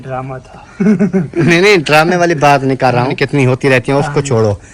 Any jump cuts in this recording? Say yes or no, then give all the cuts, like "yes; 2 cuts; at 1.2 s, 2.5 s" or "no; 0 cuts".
yes; 1 cut; at 3.2 s